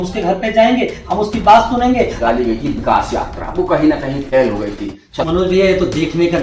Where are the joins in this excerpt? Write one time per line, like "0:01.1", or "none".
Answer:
0:02.2
0:05.1